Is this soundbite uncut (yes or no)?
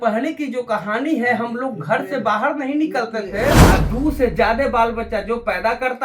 no